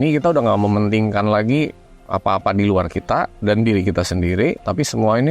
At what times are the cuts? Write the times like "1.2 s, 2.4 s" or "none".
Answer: none